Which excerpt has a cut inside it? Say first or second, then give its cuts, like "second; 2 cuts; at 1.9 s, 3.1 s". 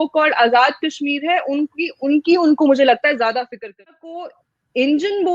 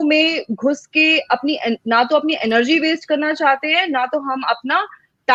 first; 1 cut; at 4.1 s